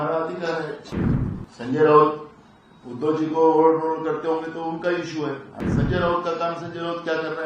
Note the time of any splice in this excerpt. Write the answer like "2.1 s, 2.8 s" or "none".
0.9 s, 5.5 s